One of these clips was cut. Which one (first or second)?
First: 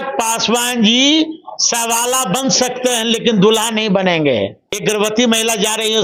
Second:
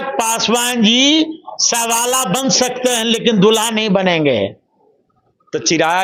first